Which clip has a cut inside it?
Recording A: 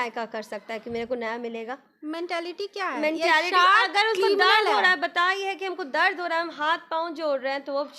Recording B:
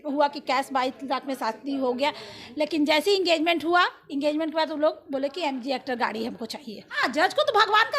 B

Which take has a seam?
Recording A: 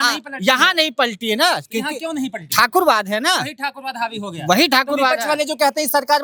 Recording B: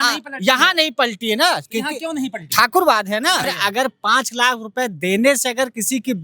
B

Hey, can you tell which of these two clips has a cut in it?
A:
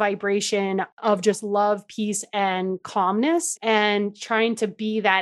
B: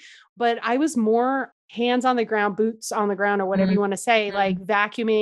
A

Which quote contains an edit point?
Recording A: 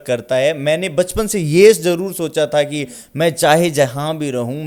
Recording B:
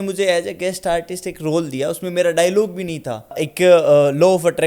B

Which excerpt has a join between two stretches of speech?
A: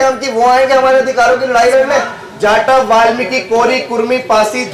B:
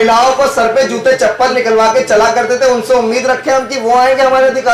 A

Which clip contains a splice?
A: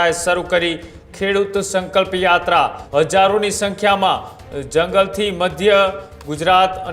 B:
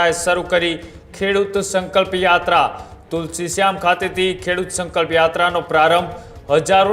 A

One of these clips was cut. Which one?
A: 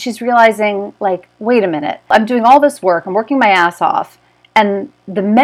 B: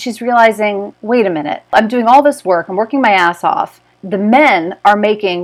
B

